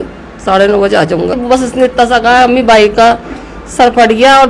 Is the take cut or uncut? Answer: cut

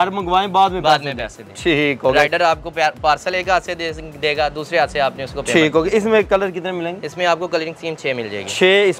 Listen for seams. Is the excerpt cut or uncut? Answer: uncut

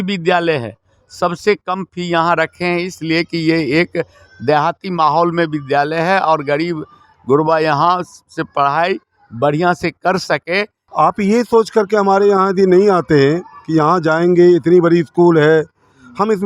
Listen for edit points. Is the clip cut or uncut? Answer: cut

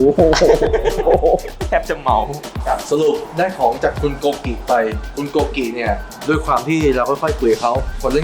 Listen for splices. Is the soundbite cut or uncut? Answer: cut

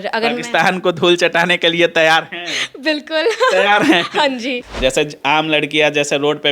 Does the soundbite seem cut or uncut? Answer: cut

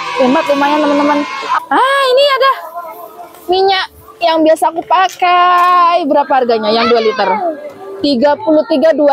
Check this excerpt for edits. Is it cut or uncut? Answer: cut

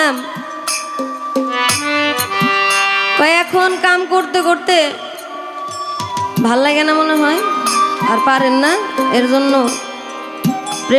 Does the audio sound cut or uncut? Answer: uncut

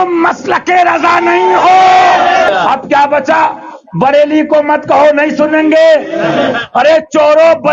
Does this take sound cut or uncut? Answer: cut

